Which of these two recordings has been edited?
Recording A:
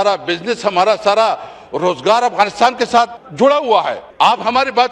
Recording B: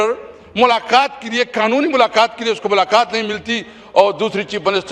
A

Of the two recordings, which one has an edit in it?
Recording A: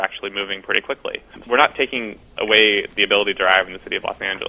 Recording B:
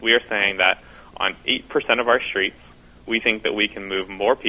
A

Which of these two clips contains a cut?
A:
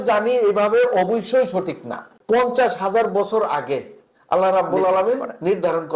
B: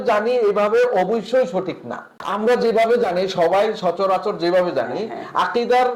A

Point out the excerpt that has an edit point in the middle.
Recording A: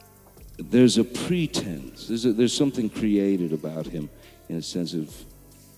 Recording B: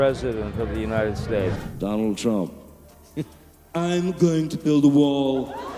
B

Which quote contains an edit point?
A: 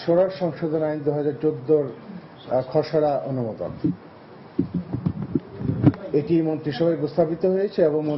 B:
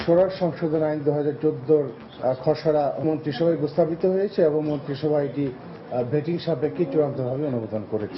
B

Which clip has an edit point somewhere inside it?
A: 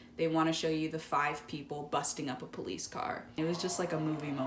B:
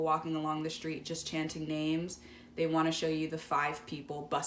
A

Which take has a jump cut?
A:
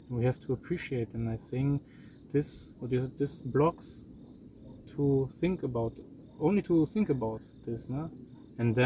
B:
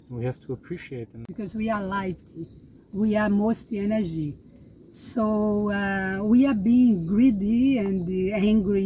B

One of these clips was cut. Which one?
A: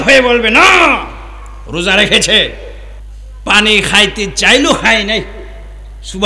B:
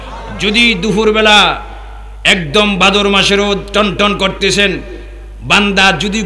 A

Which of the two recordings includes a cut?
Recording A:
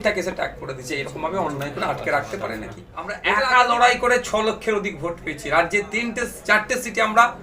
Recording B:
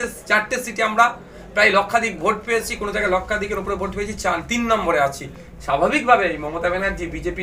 A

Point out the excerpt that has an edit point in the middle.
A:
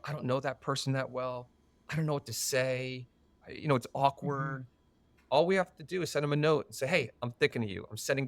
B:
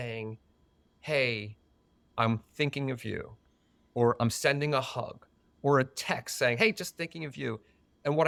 A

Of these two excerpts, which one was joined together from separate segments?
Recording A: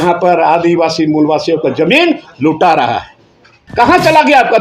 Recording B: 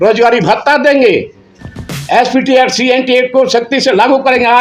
A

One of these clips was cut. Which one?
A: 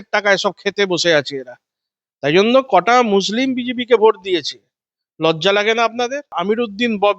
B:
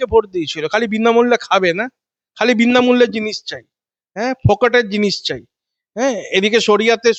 A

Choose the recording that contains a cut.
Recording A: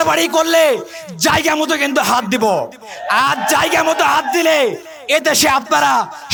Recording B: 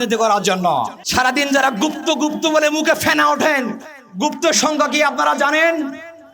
B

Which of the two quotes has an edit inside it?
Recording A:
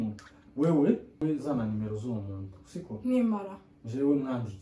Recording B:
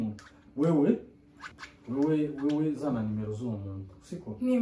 A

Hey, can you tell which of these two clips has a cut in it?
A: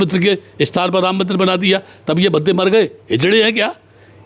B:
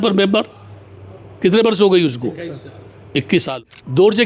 B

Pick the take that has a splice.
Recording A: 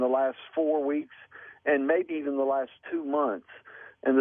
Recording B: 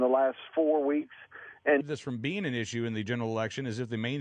A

